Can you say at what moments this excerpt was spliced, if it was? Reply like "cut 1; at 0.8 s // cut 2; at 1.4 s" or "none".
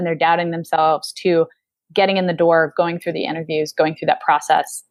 none